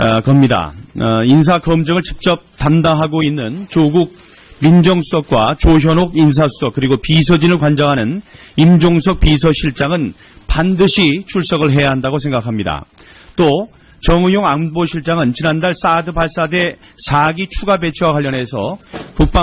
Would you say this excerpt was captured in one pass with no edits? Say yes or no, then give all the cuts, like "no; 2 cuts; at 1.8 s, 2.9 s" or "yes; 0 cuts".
yes; 0 cuts